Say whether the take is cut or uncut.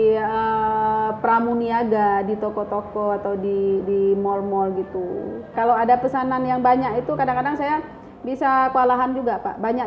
cut